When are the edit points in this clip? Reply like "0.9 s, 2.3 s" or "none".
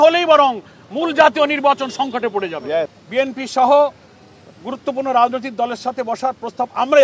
3.0 s